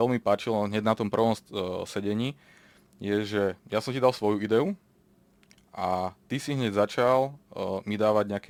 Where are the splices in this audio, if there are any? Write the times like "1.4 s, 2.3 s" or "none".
none